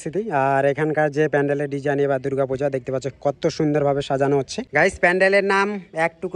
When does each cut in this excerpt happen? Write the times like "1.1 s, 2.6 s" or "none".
4.6 s